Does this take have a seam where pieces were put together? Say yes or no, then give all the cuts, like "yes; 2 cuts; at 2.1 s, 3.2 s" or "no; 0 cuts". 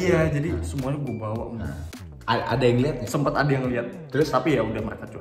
yes; 1 cut; at 1.8 s